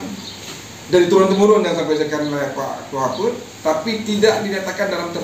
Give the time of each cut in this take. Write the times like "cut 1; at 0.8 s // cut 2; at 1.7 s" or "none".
none